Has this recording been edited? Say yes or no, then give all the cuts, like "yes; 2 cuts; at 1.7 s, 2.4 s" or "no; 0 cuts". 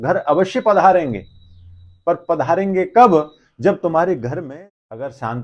yes; 1 cut; at 4.3 s